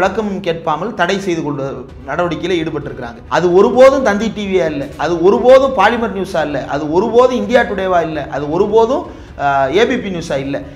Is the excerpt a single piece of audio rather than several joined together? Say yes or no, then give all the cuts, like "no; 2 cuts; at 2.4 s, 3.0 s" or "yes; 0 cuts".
no; 1 cut; at 3.2 s